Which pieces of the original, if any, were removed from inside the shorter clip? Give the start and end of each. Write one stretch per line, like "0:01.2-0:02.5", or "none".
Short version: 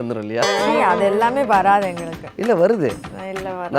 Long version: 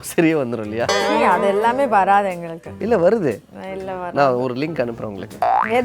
none

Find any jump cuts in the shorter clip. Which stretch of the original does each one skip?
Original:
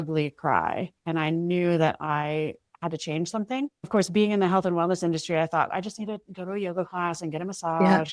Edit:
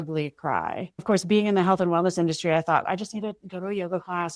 0:00.9-0:03.8

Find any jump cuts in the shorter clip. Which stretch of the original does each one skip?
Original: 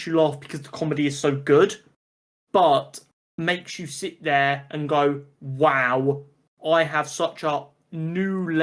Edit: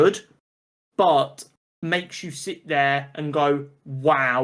none

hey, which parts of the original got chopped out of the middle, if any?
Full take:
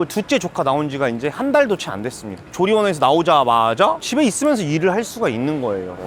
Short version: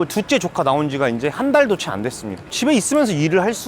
0:02.5-0:04.0

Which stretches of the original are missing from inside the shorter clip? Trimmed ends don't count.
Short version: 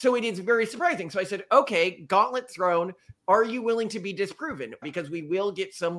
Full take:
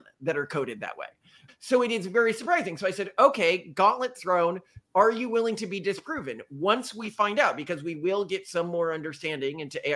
0:06.5-0:07.6

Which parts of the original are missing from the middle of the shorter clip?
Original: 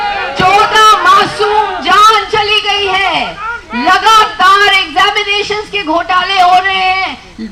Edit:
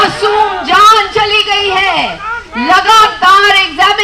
none

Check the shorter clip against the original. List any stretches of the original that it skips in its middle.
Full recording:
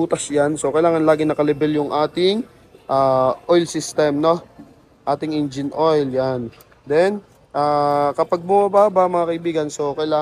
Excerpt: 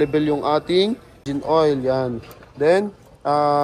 0:02.7-0:05.6

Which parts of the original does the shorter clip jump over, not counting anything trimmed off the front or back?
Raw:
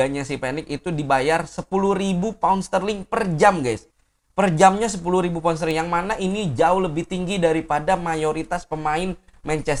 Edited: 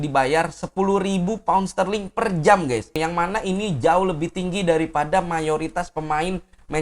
0:03.9-0:05.7

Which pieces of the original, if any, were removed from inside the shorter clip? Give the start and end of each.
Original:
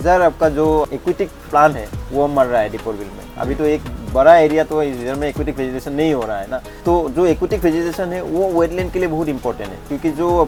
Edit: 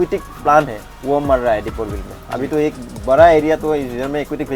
none

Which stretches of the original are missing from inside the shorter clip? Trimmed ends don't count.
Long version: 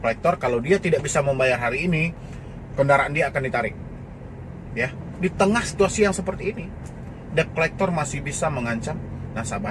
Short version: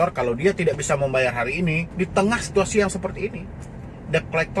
0:02.1-0:05.1

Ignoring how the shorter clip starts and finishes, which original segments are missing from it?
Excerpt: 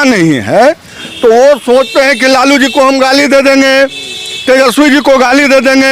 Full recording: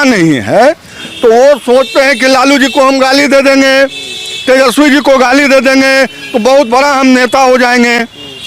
none

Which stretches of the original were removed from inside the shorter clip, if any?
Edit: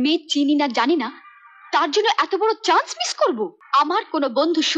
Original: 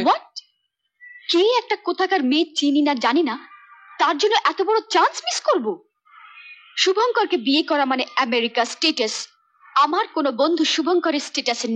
0:05.9-0:09.6

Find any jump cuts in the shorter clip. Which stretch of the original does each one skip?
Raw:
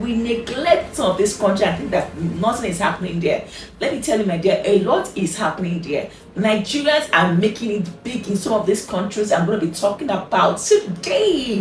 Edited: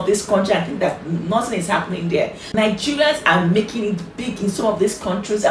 0:03.5-0:06.3

